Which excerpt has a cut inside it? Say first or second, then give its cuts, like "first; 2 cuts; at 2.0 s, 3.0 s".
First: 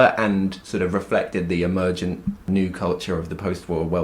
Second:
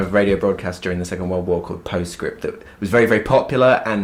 first; 1 cut; at 2.5 s